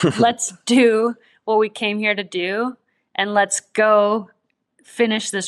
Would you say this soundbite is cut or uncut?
uncut